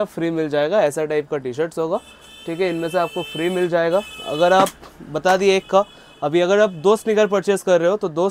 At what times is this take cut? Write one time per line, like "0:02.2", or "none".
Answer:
none